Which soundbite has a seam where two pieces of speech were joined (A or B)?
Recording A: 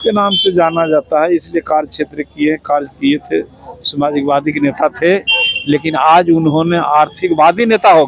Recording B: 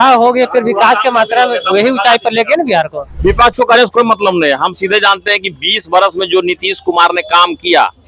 B